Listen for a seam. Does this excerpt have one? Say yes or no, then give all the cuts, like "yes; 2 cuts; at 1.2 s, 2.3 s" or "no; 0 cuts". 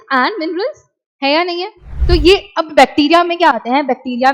yes; 1 cut; at 1.9 s